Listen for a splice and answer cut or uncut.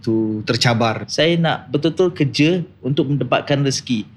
cut